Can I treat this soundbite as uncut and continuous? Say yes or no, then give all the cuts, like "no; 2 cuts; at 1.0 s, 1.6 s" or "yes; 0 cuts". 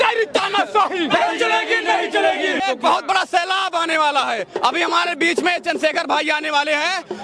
no; 1 cut; at 2.6 s